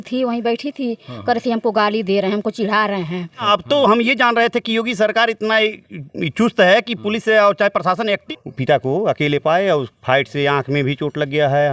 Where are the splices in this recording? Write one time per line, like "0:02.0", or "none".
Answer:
0:03.4
0:08.2